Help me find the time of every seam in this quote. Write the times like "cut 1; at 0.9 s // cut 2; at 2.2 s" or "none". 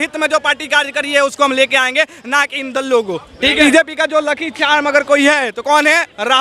cut 1; at 3.6 s